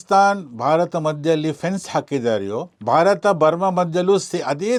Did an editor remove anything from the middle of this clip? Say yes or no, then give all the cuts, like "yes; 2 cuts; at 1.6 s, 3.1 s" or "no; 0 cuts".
no; 0 cuts